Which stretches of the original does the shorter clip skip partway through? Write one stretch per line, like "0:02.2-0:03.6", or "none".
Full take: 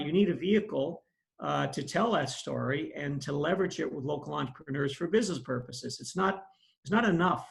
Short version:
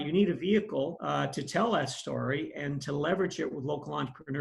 0:01.0-0:01.4